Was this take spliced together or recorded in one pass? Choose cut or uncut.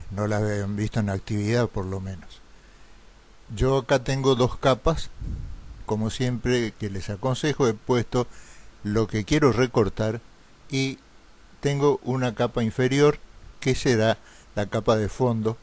cut